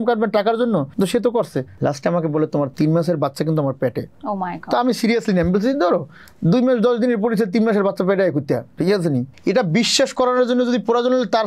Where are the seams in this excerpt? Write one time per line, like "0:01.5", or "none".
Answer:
0:00.9
0:01.7
0:02.7
0:04.1
0:09.3